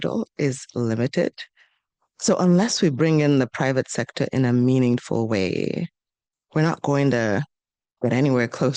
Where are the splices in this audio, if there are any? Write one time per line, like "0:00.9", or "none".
none

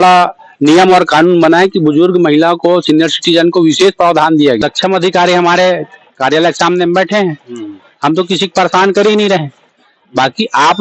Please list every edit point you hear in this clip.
0:04.6

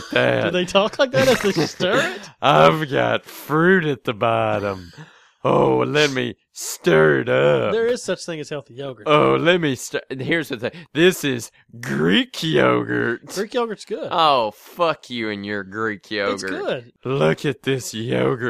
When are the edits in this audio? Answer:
0:16.9

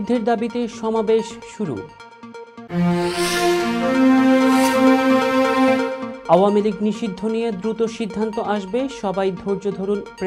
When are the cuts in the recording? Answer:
none

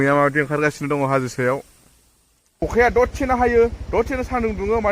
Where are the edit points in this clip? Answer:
0:02.6

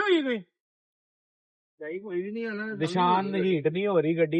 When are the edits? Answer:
none

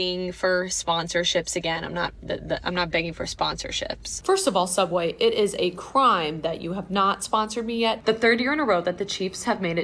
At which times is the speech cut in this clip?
0:04.1
0:08.0

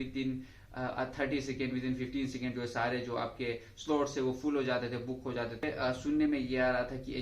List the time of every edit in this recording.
0:05.6

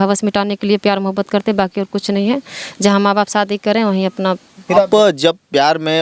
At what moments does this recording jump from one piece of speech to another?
0:04.8

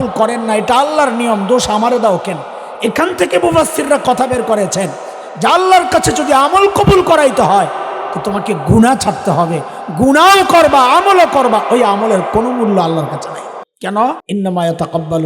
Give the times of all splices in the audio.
0:13.7
0:14.2

